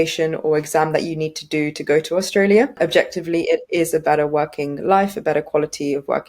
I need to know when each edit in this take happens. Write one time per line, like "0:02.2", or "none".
0:02.7